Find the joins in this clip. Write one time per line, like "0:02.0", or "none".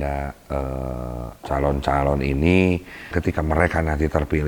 0:01.3
0:03.1